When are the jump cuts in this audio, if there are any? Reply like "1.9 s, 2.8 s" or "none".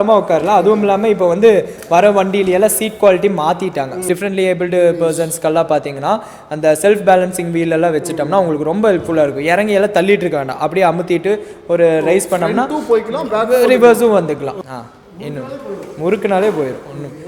4.0 s, 14.7 s